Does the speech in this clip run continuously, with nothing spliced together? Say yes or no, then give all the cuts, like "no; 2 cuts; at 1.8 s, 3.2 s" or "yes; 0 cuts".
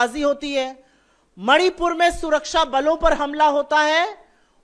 yes; 0 cuts